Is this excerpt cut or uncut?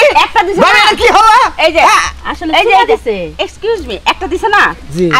uncut